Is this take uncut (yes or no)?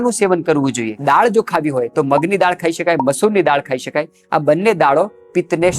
no